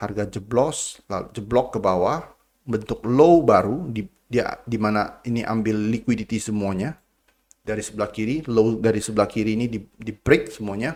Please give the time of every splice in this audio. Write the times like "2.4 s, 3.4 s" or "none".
none